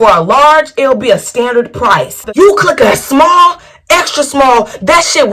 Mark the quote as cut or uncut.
cut